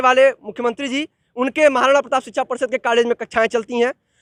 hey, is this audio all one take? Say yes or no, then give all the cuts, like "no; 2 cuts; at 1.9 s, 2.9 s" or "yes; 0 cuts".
yes; 0 cuts